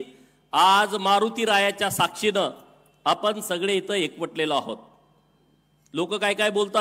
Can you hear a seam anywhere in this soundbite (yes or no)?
no